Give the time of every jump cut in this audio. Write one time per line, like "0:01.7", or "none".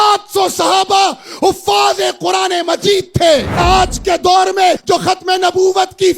0:03.6
0:04.8